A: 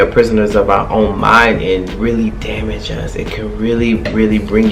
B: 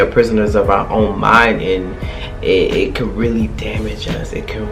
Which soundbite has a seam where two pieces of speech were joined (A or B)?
A